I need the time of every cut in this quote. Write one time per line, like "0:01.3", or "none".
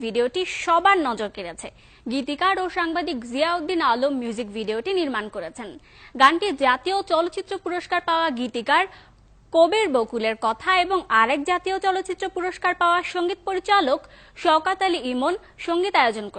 0:15.0

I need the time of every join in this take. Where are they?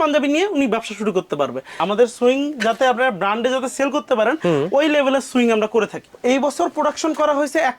0:01.7
0:06.1

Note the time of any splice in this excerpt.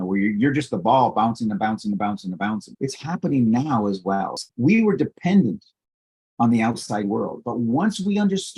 0:02.7
0:04.5

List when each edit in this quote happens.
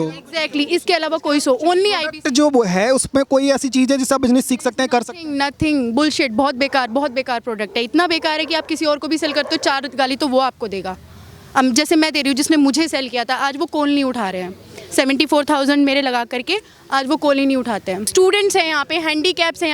0:18.0

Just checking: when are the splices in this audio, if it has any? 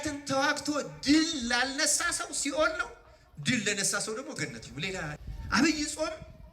0:05.2

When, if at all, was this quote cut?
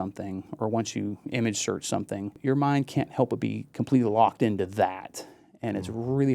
0:02.3

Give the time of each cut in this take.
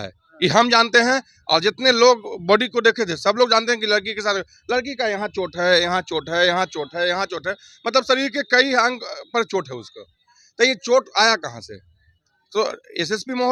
none

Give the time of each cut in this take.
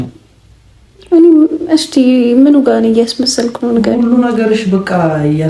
none

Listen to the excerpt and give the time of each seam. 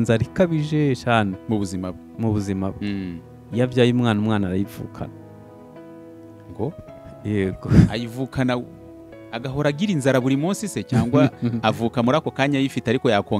none

